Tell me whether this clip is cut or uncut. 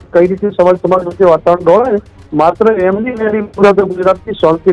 cut